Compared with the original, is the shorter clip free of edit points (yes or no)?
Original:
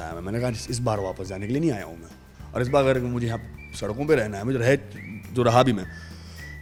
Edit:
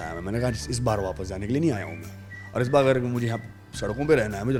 yes